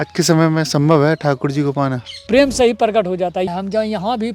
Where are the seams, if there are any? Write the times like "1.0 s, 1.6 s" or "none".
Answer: 2.2 s, 3.5 s